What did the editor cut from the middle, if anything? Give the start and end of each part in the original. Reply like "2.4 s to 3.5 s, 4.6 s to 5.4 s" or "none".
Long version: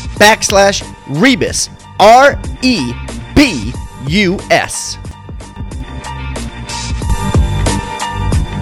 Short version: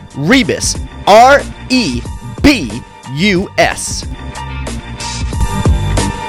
4.7 s to 5.5 s